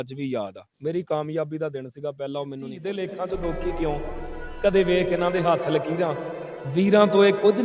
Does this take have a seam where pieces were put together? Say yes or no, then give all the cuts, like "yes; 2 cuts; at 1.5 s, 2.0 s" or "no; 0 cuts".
yes; 1 cut; at 2.8 s